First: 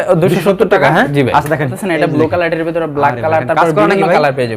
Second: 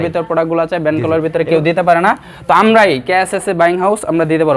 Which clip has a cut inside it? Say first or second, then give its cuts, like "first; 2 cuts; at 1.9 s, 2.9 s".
first; 1 cut; at 1.7 s